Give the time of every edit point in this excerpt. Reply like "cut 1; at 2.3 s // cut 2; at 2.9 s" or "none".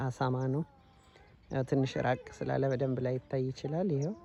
none